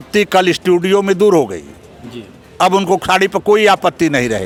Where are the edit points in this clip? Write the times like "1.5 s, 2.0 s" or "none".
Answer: none

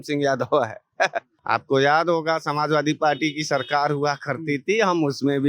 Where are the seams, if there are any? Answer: 1.3 s

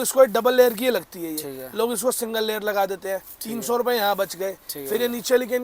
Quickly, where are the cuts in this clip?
none

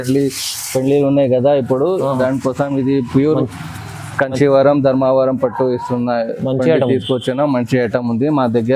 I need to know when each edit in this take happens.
none

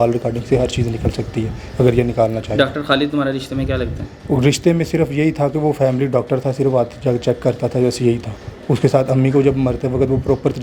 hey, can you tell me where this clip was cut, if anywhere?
none

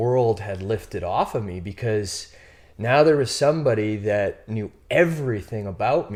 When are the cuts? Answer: none

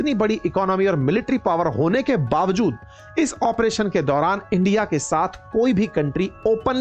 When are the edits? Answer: none

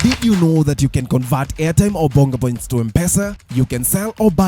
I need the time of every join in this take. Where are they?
3.4 s

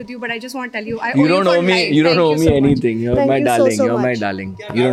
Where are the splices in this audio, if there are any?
none

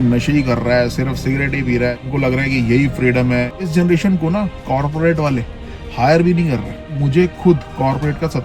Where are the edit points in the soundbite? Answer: 2.0 s, 3.7 s, 7.0 s

